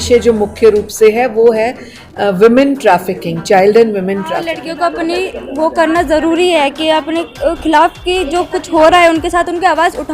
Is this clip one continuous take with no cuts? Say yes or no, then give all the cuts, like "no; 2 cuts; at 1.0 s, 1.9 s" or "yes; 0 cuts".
no; 1 cut; at 4.5 s